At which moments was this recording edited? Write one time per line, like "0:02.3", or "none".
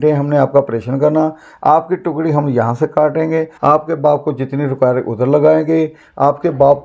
0:03.5